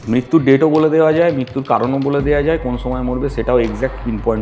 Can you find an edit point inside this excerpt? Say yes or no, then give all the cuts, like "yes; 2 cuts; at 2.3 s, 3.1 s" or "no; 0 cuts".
no; 0 cuts